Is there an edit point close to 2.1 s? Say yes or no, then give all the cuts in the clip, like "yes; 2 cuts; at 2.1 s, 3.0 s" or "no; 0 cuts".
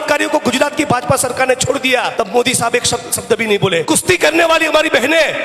yes; 2 cuts; at 2.1 s, 3.8 s